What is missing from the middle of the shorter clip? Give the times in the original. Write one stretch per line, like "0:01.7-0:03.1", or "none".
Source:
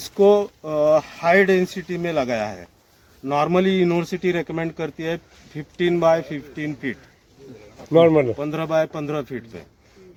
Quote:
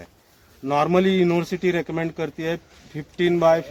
none